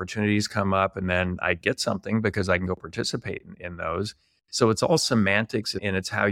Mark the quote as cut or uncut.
uncut